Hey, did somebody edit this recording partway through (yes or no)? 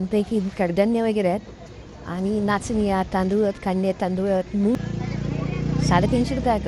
yes